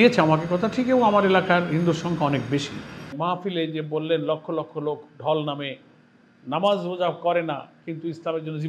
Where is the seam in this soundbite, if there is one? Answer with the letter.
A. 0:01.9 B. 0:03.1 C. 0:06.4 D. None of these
B